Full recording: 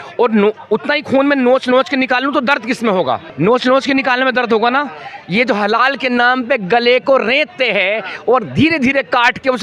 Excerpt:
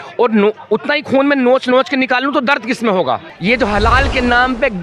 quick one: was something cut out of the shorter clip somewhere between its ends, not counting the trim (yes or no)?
yes